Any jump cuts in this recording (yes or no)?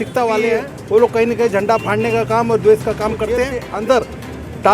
yes